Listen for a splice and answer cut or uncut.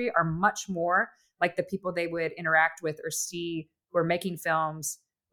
uncut